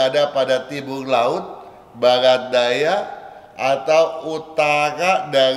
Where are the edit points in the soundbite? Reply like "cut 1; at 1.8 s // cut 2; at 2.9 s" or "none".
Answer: none